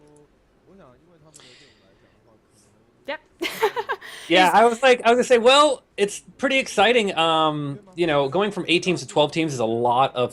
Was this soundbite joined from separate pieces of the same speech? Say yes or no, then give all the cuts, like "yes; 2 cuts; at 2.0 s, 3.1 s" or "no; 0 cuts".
no; 0 cuts